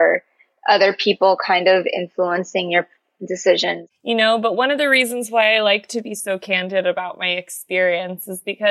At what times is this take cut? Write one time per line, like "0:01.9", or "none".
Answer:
0:03.8